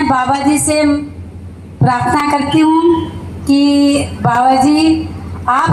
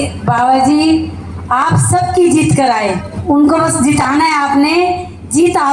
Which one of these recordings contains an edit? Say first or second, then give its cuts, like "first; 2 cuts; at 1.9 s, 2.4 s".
second; 1 cut; at 3.2 s